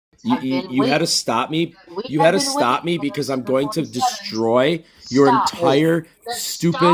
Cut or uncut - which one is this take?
uncut